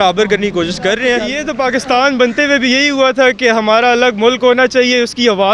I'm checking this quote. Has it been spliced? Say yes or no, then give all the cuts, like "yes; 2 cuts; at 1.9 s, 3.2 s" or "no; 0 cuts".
yes; 1 cut; at 1.4 s